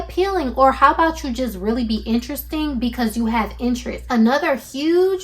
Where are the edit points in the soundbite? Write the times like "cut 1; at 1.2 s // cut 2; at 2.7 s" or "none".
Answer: cut 1; at 4.0 s